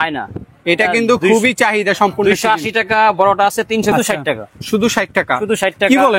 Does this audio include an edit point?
yes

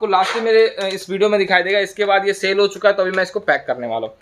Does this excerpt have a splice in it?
no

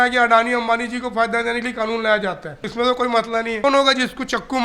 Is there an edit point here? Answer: yes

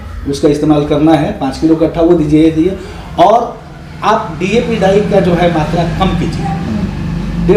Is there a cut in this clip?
no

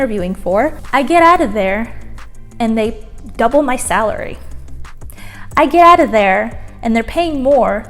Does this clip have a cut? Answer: no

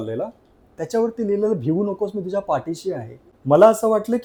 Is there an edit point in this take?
no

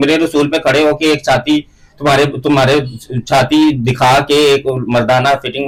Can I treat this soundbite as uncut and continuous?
yes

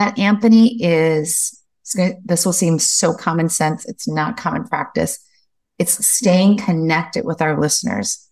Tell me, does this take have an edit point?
no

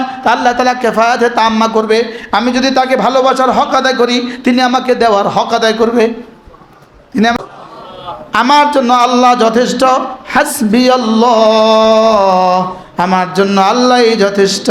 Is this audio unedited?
no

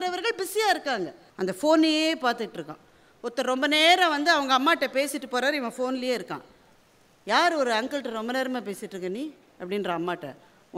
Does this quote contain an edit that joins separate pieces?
yes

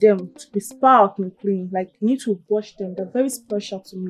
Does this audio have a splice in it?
no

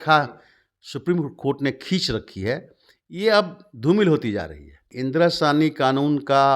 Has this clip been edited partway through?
yes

